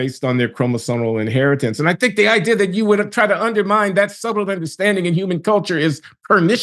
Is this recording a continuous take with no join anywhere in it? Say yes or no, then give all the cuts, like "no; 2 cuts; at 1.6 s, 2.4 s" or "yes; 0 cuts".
yes; 0 cuts